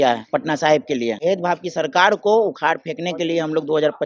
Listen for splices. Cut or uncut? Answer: cut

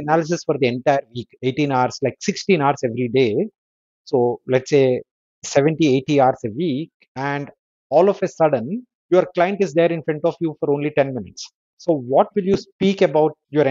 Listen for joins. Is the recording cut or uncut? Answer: uncut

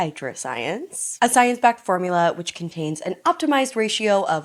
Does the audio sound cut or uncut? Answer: uncut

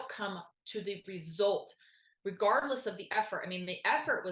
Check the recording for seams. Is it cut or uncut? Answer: uncut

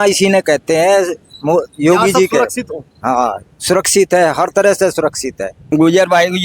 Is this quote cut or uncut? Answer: cut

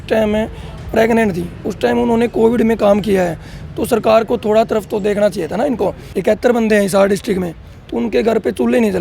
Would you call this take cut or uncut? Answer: cut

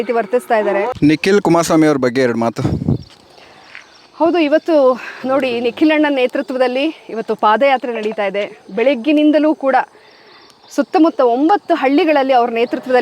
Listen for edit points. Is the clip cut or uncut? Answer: cut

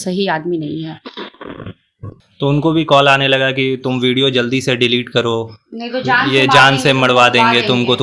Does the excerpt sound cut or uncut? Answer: cut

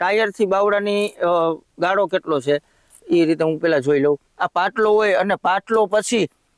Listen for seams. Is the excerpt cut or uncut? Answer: cut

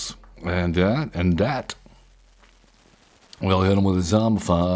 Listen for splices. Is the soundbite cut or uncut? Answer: uncut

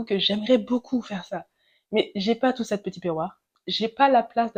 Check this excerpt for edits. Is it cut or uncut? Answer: uncut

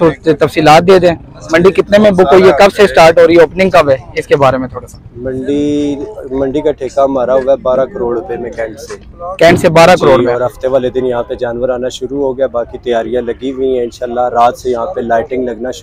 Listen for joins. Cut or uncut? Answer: uncut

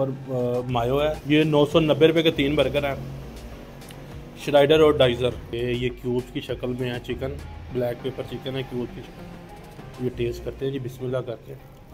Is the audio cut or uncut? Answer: cut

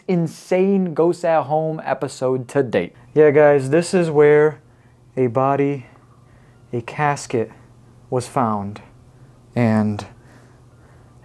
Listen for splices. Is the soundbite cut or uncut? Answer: cut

